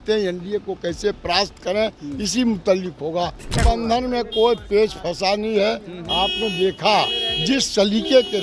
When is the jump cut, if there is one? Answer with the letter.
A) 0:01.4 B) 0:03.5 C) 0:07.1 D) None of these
B